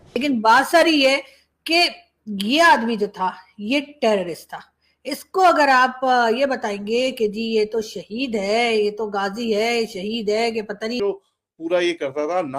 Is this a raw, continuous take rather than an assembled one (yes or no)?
no